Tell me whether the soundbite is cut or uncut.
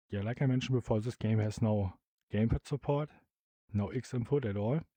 uncut